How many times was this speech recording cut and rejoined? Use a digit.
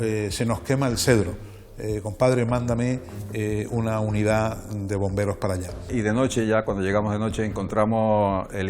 1